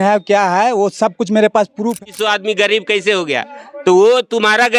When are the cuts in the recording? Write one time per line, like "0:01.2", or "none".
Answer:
0:02.0

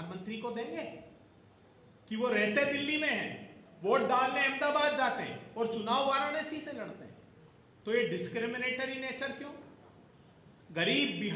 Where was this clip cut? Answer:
none

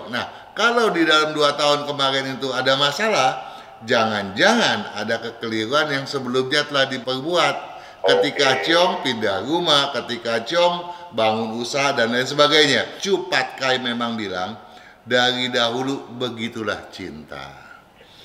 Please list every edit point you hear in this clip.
0:07.0
0:13.0

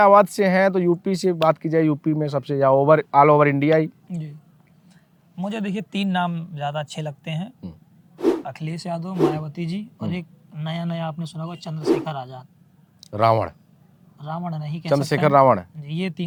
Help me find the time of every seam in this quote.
none

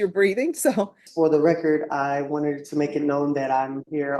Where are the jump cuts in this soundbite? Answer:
0:01.0

